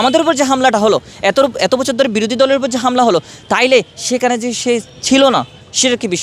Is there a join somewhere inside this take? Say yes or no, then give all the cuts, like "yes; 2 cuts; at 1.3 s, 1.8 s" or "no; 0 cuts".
no; 0 cuts